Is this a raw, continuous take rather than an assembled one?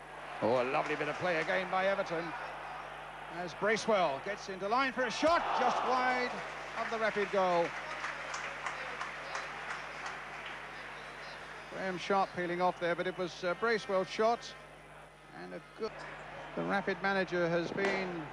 no; 1 cut; at 15.8 s

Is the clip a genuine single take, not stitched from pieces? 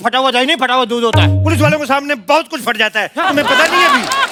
yes; 0 cuts

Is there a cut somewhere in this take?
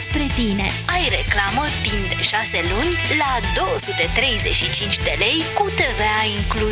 no; 0 cuts

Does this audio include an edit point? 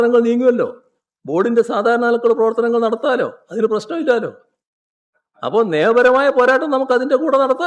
no; 0 cuts

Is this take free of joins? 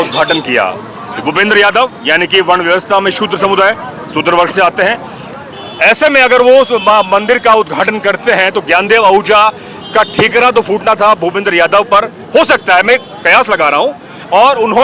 yes; 0 cuts

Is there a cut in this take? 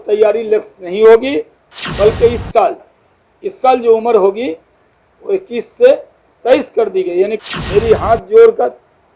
yes; 1 cut; at 7.4 s

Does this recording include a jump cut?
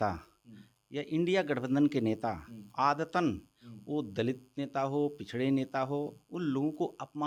no; 0 cuts

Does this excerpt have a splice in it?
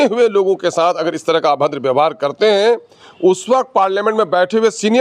no; 0 cuts

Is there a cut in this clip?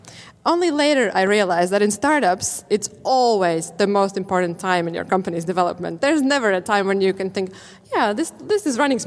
yes; 2 cuts; at 2.6 s, 5.9 s

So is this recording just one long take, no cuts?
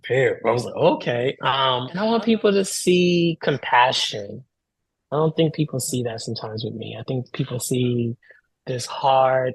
no; 1 cut; at 1.9 s

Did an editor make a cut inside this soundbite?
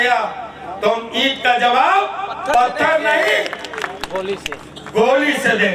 no; 0 cuts

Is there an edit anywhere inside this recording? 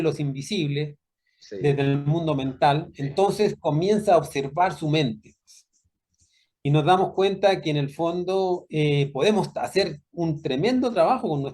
no; 0 cuts

